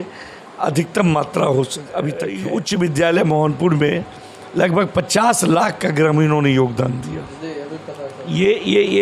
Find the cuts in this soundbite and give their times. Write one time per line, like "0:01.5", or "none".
0:02.4